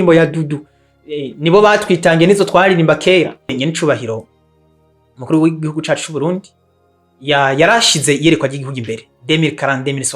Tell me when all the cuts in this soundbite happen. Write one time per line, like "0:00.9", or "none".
0:03.6

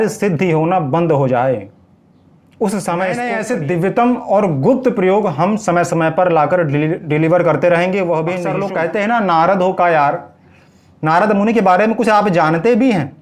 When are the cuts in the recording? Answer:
0:03.4
0:08.5

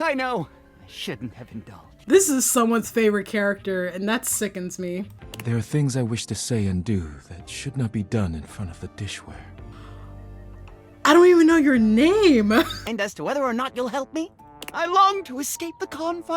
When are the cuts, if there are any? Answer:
0:05.2
0:12.8

